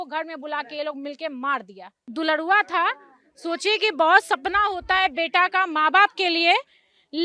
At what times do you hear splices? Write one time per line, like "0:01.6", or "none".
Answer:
0:02.1

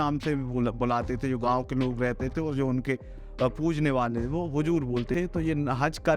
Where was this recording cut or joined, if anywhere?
0:05.1

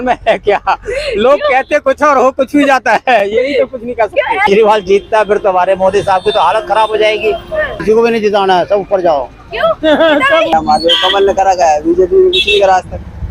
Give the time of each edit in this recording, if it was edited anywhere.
0:04.5
0:07.7
0:10.5

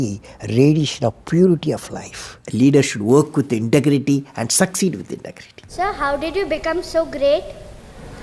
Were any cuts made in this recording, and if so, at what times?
0:02.4
0:05.7

